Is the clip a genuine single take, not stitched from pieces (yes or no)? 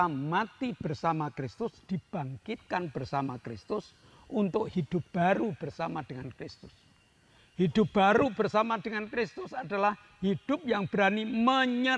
yes